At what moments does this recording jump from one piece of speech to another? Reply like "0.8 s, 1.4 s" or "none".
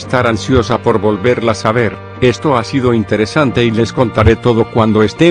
none